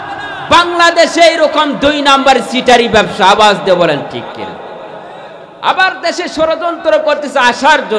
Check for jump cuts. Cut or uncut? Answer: uncut